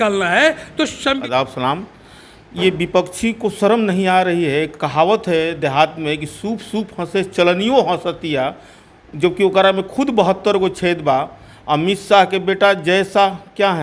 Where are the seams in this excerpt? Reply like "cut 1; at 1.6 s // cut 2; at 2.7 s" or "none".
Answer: cut 1; at 1.2 s